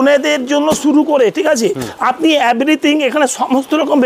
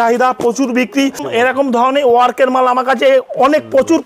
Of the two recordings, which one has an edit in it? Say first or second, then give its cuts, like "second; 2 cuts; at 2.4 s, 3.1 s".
second; 1 cut; at 1.2 s